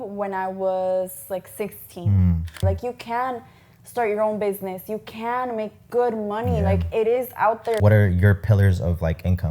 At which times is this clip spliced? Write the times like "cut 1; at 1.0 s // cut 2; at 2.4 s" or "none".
cut 1; at 2.6 s // cut 2; at 7.8 s